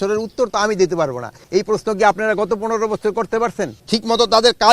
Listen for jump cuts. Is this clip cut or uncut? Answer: cut